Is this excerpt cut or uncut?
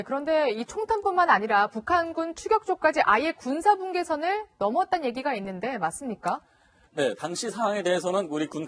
uncut